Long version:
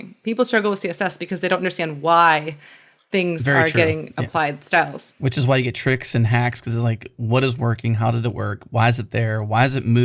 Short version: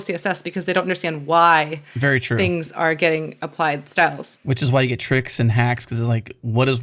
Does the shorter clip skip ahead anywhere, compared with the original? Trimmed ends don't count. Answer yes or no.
no